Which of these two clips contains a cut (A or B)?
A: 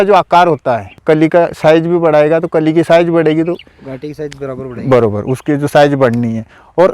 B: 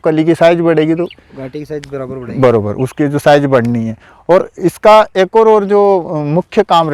A